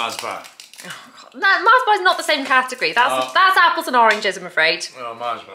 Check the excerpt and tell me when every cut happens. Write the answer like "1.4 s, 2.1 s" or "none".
none